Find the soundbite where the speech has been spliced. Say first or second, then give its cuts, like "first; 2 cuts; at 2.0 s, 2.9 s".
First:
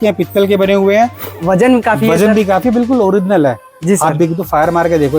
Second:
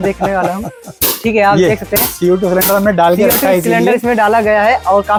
first; 1 cut; at 1.4 s